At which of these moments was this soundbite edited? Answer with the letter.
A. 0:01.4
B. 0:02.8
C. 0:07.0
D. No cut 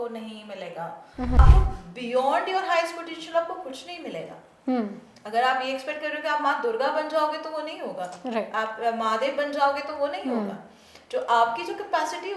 A